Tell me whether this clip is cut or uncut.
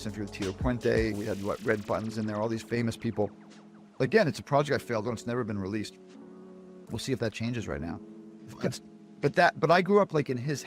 uncut